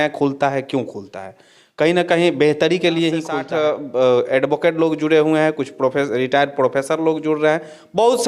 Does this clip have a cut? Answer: yes; 1 cut; at 3.4 s

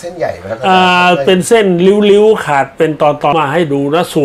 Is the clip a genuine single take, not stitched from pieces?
no; 1 cut; at 3.3 s

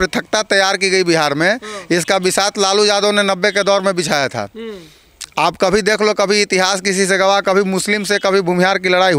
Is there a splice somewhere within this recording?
no; 0 cuts

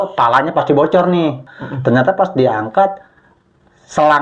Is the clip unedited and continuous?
no; 1 cut; at 1.5 s

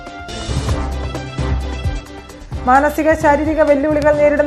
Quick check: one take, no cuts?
yes; 0 cuts

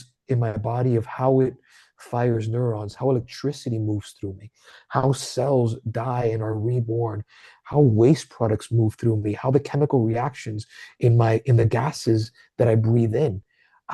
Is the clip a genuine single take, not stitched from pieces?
yes; 0 cuts

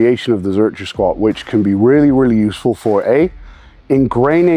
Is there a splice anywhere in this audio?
no; 0 cuts

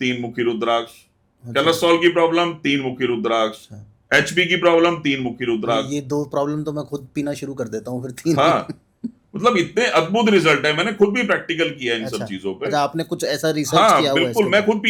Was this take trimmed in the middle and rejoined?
no; 0 cuts

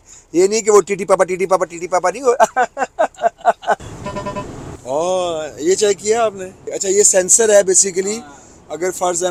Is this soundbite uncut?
yes; 0 cuts

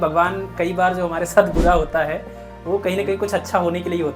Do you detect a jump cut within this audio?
no; 0 cuts

